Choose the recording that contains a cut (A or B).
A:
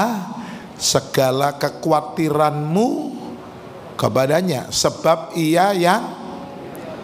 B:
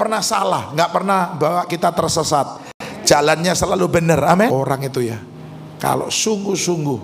B